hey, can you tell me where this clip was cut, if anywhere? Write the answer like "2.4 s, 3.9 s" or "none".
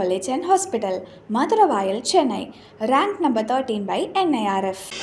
none